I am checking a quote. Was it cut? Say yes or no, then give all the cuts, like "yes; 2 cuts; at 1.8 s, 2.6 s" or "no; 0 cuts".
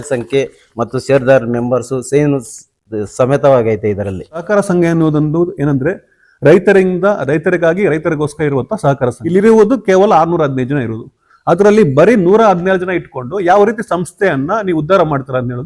yes; 2 cuts; at 4.5 s, 9.2 s